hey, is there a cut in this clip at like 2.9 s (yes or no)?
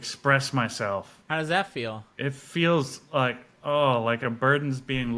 no